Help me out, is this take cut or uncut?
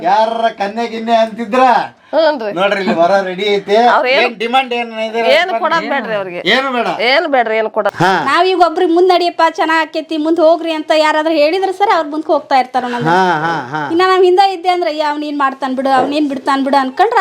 cut